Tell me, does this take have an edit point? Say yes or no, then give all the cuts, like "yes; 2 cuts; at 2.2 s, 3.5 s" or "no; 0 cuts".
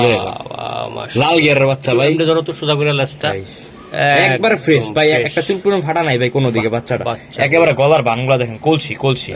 no; 0 cuts